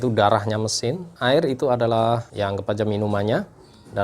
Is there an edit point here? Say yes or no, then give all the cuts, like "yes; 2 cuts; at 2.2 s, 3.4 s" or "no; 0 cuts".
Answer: yes; 2 cuts; at 1.1 s, 2.3 s